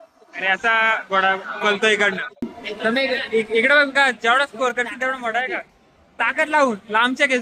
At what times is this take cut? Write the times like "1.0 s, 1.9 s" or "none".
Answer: 2.5 s